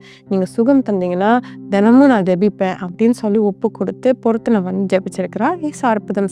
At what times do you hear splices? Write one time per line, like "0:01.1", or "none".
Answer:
none